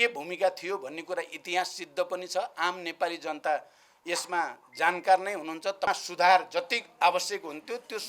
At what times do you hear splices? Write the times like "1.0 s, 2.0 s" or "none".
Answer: 5.9 s